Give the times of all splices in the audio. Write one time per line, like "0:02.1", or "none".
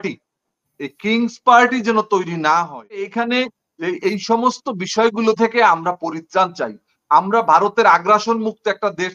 0:03.1